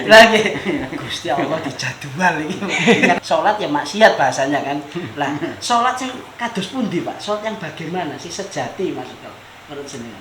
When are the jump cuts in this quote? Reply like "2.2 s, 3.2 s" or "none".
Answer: 3.2 s